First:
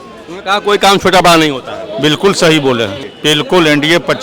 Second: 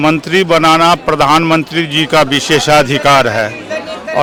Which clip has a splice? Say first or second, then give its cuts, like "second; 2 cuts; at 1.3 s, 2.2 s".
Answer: first; 1 cut; at 3.1 s